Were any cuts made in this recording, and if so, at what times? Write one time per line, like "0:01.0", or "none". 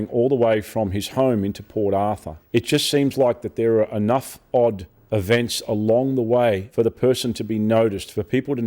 0:02.3
0:04.9
0:06.7